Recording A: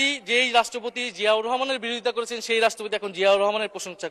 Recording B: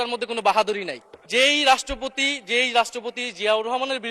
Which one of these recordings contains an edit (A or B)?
B